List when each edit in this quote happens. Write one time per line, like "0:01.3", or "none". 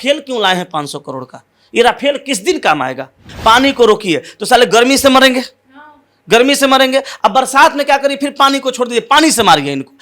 0:03.3